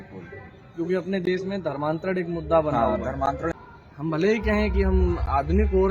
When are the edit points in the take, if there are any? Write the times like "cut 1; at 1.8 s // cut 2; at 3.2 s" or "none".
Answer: cut 1; at 3.6 s

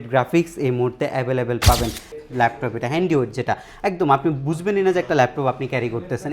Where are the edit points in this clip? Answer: cut 1; at 2.1 s

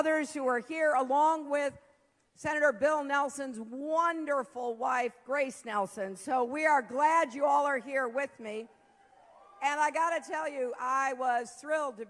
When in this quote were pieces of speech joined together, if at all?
cut 1; at 7.2 s

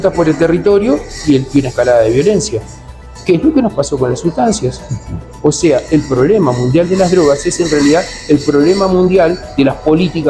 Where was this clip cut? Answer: none

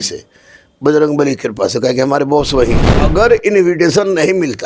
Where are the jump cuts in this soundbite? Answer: cut 1; at 2.9 s

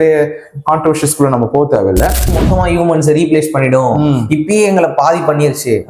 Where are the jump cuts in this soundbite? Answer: cut 1; at 2.4 s

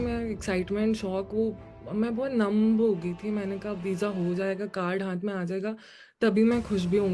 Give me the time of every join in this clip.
none

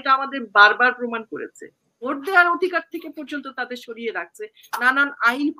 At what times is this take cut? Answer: cut 1; at 1.9 s

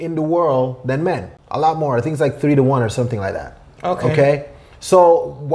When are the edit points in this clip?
cut 1; at 1.4 s

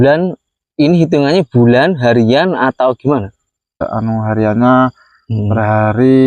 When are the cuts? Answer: cut 1; at 3.8 s

